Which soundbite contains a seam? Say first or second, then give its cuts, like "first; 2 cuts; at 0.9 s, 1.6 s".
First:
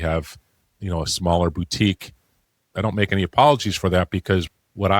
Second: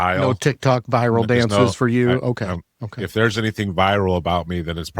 first; 1 cut; at 2.5 s